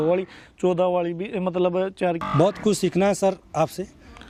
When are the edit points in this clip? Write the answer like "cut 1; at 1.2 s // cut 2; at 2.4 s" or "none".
none

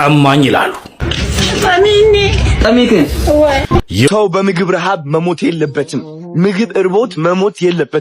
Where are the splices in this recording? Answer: cut 1; at 4.1 s

